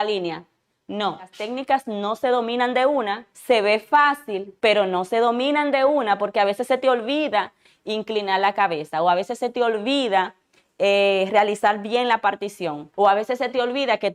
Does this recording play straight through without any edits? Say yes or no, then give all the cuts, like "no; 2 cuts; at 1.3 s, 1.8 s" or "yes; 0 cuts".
no; 1 cut; at 1.4 s